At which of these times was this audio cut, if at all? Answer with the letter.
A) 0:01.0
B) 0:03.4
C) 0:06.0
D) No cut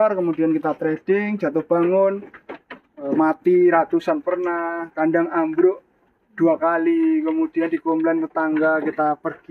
D